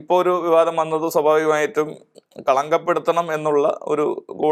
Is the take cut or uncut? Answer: uncut